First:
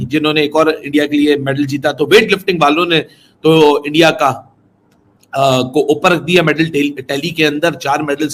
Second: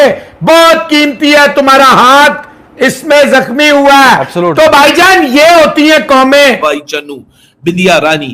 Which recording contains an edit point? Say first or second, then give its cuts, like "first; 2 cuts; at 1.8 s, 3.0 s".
second; 1 cut; at 6.6 s